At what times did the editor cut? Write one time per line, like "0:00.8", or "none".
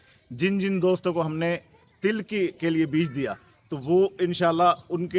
none